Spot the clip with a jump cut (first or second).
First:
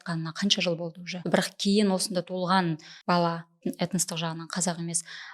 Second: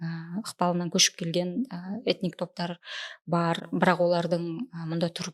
first